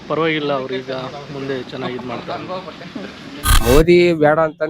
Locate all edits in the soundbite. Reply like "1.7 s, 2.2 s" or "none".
3.5 s

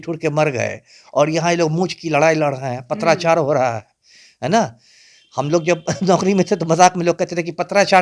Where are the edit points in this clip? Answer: none

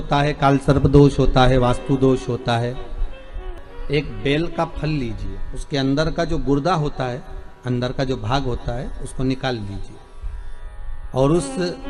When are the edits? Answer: 3.4 s

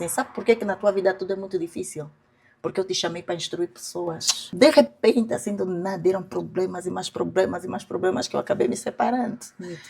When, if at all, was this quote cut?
4.4 s

